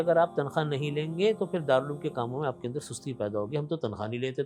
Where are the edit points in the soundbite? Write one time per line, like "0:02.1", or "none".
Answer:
none

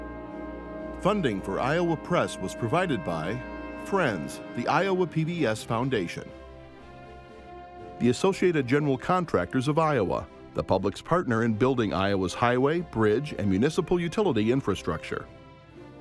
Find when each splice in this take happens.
0:01.0
0:06.3
0:08.0

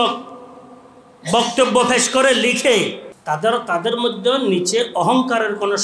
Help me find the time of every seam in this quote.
0:03.1

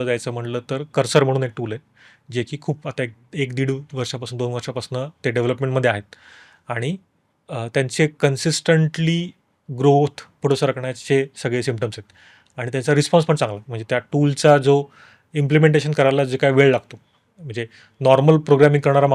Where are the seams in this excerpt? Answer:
none

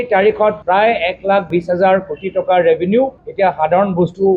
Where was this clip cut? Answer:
none

